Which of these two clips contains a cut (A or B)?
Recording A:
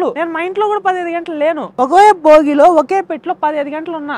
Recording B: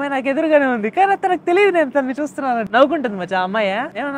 B